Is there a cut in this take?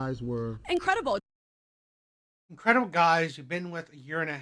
no; 0 cuts

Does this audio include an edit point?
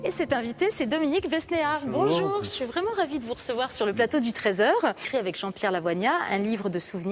yes; 1 cut; at 4.3 s

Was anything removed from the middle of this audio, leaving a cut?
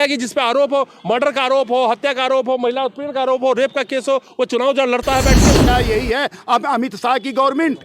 yes; 1 cut; at 5.6 s

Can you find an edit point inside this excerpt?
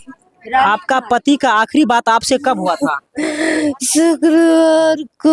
no; 0 cuts

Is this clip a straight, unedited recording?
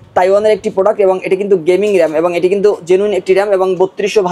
yes; 0 cuts

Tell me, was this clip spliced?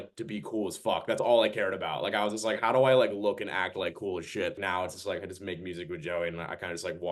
yes; 1 cut; at 4.6 s

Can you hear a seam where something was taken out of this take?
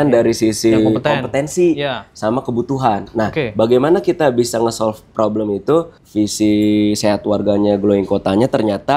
yes; 1 cut; at 6.0 s

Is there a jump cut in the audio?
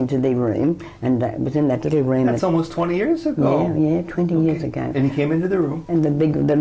no; 0 cuts

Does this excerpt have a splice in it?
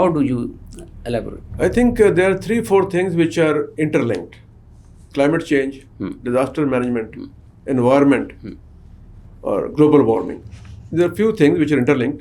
no; 0 cuts

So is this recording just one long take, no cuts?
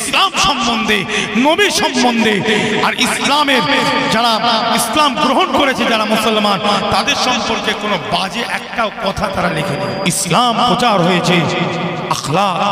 no; 1 cut; at 9.6 s

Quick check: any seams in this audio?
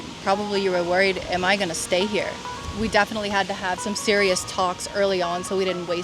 no; 0 cuts

